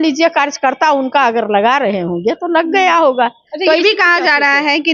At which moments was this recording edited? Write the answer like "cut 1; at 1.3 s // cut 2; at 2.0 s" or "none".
none